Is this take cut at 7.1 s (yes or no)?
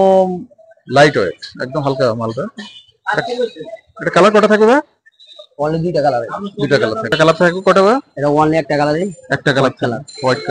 yes